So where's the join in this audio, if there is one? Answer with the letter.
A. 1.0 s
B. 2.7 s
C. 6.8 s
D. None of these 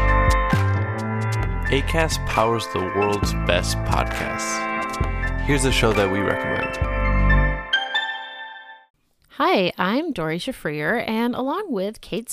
A